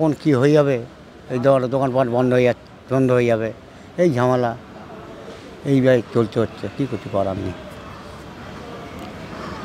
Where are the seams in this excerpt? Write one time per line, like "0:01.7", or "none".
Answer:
none